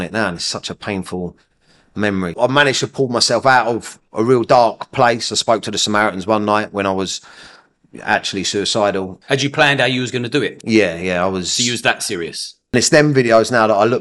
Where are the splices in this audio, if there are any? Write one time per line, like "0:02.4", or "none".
0:02.3
0:09.1
0:12.7